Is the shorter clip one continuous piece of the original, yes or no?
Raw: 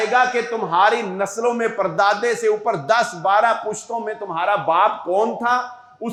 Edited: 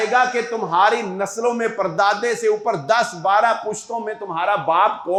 yes